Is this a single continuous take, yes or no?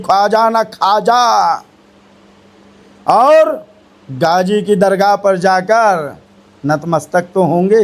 yes